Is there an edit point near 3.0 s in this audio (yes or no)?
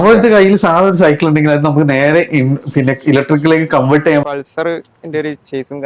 no